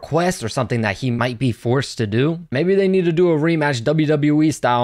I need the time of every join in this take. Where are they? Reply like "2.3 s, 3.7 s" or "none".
2.5 s